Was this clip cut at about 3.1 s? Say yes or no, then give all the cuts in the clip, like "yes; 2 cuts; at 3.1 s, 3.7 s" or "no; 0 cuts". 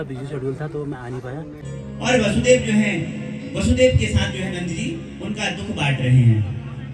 no; 1 cut; at 1.6 s